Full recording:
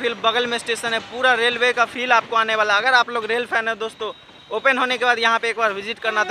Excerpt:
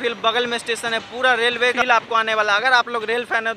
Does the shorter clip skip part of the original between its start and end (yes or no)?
yes